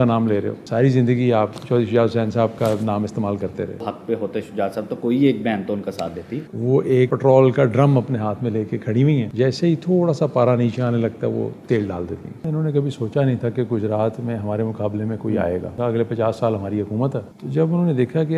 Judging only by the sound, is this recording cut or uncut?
cut